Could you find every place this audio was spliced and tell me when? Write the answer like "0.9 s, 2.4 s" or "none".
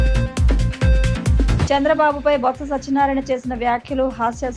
1.5 s